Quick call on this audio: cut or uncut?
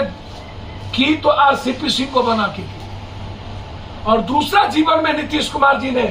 uncut